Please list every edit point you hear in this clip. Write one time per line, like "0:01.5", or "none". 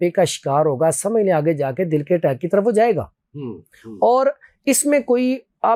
none